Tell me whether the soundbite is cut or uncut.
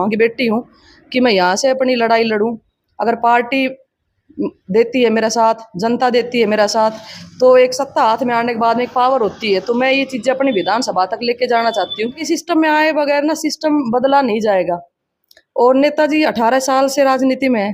cut